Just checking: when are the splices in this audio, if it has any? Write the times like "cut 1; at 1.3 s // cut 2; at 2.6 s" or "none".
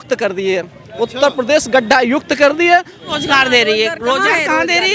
cut 1; at 3.0 s